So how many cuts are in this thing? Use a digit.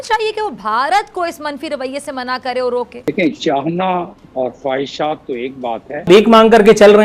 2